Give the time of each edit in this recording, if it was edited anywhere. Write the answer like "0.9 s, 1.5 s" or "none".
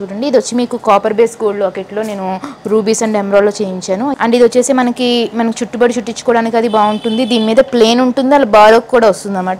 4.1 s